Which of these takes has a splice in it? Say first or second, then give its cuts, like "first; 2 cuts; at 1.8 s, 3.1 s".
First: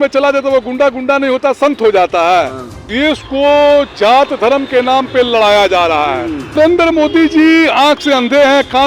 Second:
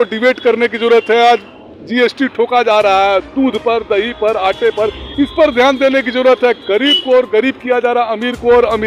first; 2 cuts; at 2.9 s, 6.6 s